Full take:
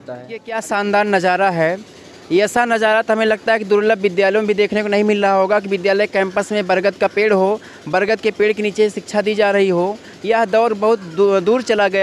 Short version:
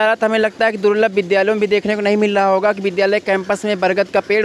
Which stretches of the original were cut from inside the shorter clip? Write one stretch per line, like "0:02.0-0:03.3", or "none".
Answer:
none